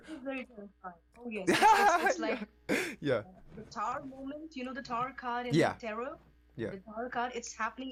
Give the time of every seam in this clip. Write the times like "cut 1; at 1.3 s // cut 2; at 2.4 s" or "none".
none